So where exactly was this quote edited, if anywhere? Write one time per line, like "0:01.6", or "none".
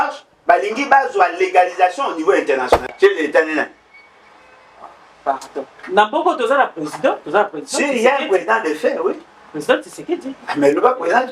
0:02.7